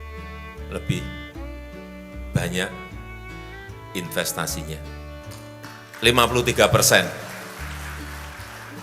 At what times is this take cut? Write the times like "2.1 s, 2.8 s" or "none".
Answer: 4.8 s, 6.0 s